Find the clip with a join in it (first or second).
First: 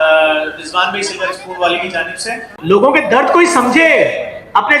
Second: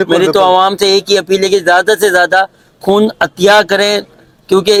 first